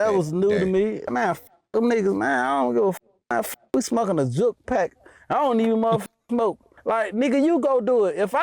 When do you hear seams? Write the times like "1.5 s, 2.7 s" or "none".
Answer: 1.1 s, 6.7 s

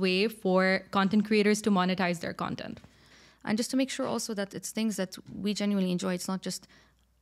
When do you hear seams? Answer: 3.1 s

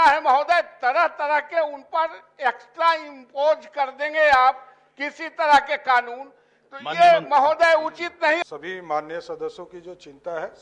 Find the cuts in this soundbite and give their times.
8.4 s

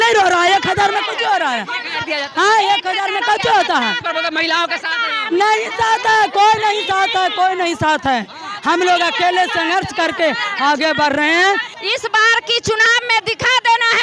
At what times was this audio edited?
11.7 s

